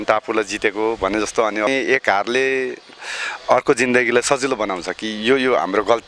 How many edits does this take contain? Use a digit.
1